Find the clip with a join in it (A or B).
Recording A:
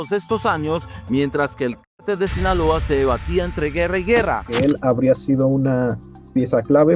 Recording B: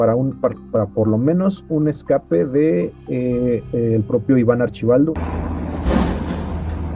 A